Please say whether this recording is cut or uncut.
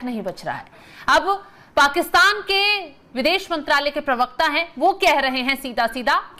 uncut